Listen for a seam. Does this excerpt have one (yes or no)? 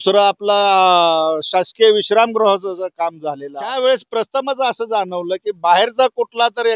yes